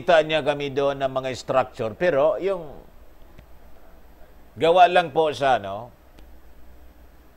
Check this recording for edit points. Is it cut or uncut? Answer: uncut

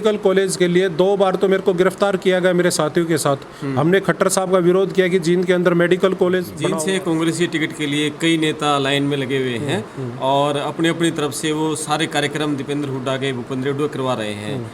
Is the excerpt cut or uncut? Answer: cut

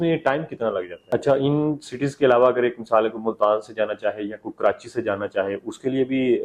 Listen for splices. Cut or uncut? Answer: cut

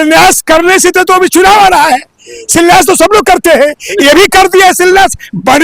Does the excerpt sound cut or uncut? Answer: uncut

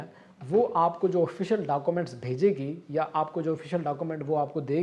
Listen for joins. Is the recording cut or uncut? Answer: uncut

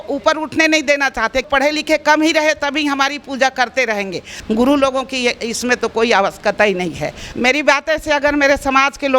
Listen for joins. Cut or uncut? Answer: cut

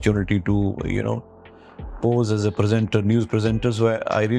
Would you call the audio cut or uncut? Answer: uncut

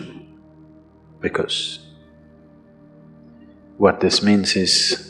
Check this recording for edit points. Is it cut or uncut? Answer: cut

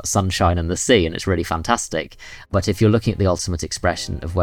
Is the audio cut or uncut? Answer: cut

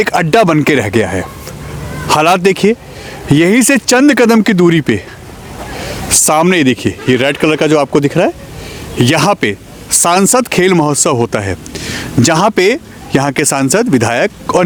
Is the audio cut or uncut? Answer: uncut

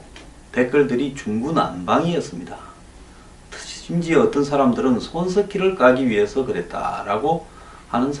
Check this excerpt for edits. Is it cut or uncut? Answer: uncut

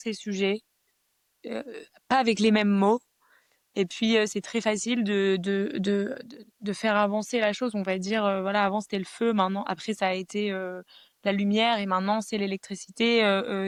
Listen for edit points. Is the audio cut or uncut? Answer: uncut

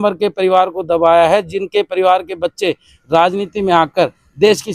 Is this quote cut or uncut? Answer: uncut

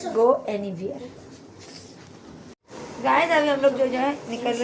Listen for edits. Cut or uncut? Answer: cut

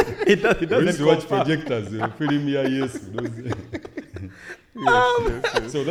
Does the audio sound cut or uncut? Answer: uncut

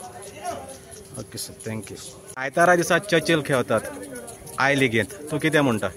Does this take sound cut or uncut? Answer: cut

